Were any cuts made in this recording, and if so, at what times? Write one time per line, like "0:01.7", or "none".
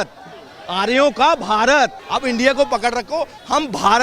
0:02.0